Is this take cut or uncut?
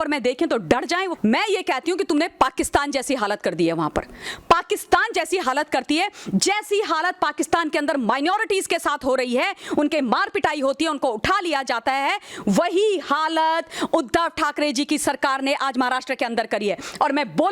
cut